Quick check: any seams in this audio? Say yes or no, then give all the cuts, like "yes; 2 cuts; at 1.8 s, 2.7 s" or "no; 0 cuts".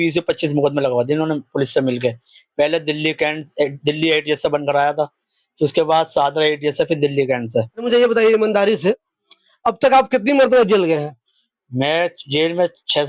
yes; 1 cut; at 7.9 s